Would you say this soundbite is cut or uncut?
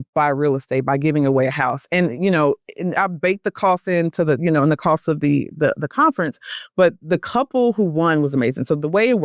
uncut